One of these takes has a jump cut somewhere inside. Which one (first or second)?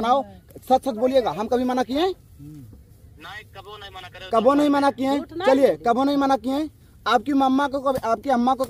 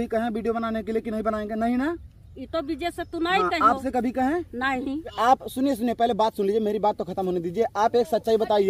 second